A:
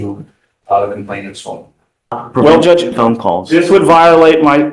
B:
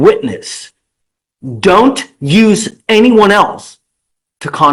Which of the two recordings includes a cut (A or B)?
A